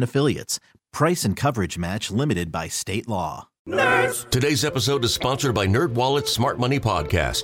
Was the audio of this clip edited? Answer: yes; 1 cut; at 3.5 s

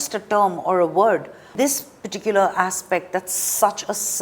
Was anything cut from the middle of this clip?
yes; 1 cut; at 1.5 s

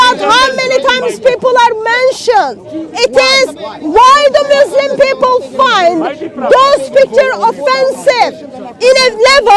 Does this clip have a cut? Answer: no; 0 cuts

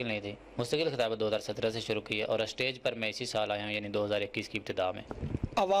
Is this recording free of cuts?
yes; 0 cuts

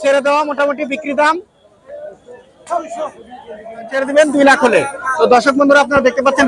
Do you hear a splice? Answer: yes; 1 cut; at 4.0 s

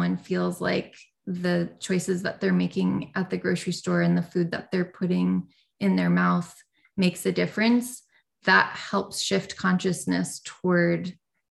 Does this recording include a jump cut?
no; 0 cuts

